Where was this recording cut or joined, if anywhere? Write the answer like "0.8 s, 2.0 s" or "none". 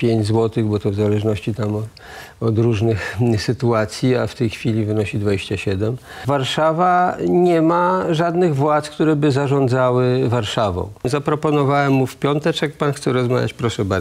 6.2 s, 11.1 s